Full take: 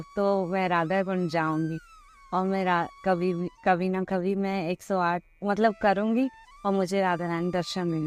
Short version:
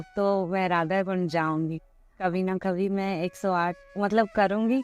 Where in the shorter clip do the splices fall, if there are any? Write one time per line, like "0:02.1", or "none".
0:02.2